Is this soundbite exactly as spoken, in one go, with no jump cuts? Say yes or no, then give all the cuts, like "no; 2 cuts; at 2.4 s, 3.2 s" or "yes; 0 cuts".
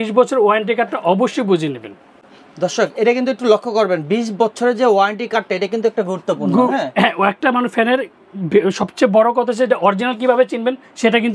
yes; 0 cuts